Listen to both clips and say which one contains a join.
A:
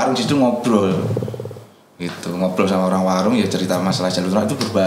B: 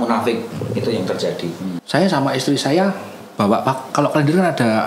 B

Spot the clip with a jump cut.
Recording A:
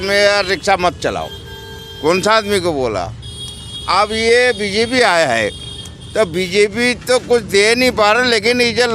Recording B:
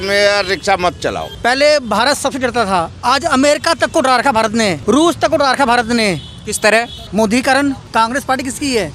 B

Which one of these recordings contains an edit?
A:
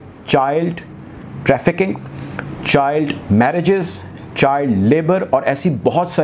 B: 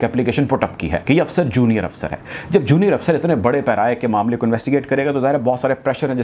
B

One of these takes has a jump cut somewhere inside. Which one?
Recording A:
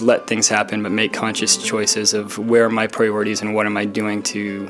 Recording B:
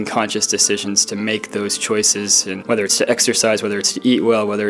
B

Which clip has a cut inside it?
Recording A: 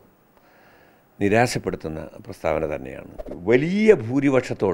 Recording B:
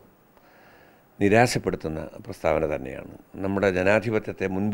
A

